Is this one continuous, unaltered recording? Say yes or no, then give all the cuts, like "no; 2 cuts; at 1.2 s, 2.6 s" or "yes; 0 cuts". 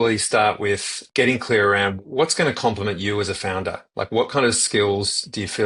no; 2 cuts; at 0.9 s, 2.0 s